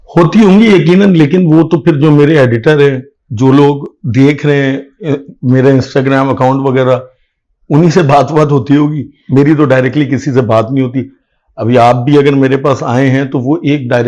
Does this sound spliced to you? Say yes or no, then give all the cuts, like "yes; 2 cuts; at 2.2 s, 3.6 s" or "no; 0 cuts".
no; 0 cuts